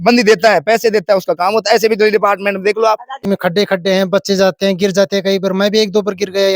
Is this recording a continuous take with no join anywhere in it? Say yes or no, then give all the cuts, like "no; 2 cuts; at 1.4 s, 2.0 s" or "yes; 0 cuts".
no; 1 cut; at 3.2 s